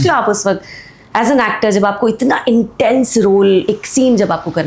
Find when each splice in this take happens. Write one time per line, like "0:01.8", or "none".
0:03.7